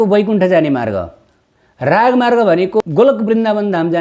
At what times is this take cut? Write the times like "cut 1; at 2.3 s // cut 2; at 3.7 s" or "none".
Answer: cut 1; at 2.8 s